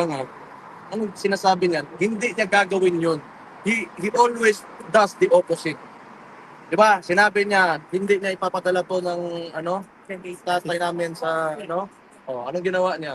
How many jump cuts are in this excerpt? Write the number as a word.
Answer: zero